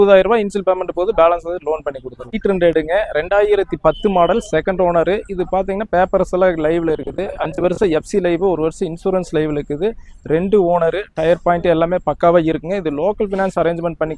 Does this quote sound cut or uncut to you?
uncut